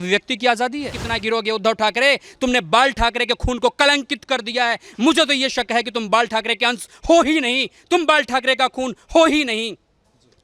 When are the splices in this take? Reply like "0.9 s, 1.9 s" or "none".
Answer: 1.1 s